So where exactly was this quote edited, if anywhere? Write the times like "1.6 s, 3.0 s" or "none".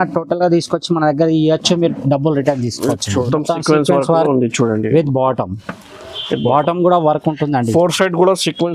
3.2 s